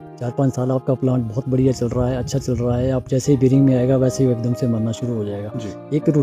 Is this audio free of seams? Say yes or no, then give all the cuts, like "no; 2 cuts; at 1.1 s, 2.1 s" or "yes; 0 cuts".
yes; 0 cuts